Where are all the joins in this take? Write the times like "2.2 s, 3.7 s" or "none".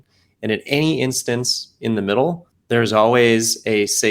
2.5 s